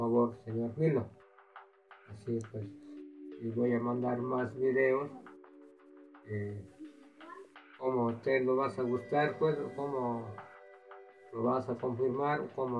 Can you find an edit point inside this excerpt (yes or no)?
no